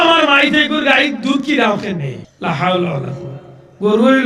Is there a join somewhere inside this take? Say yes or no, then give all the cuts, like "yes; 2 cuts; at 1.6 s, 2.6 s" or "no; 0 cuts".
yes; 1 cut; at 2.2 s